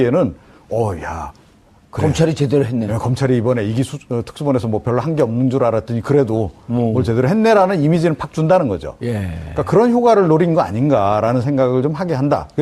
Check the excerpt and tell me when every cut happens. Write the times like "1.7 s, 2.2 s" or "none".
3.3 s

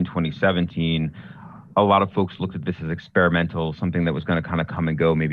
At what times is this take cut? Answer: none

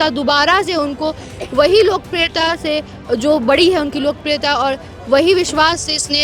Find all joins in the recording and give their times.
none

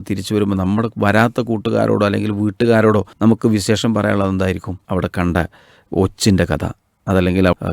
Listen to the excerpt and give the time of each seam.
3.1 s, 4.7 s

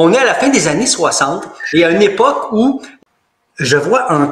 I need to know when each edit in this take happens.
2.9 s

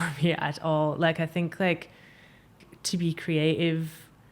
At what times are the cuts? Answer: 2.5 s

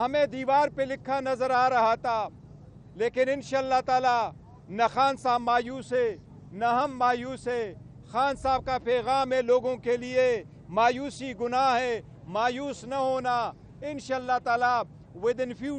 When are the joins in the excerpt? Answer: none

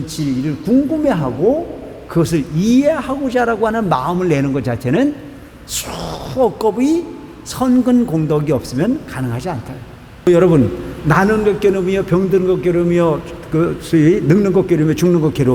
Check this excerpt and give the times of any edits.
10.3 s

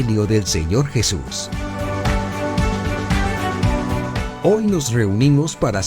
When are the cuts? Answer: 1.3 s, 4.3 s

